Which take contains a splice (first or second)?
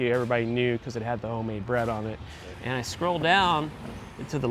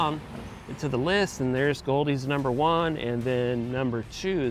first